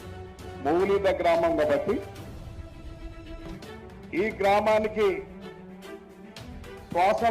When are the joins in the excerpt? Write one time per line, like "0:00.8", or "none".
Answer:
0:02.0
0:03.5